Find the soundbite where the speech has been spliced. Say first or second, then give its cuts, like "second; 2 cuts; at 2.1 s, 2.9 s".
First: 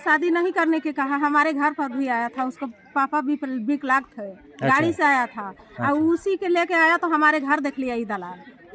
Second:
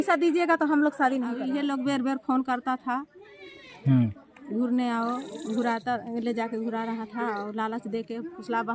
second; 1 cut; at 1.4 s